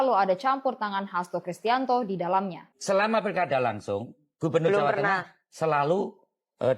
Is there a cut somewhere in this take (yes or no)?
yes